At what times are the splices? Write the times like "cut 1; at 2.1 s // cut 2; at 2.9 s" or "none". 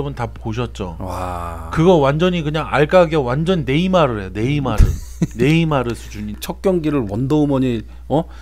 cut 1; at 6.4 s